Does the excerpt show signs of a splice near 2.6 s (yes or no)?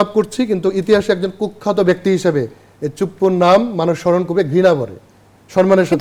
no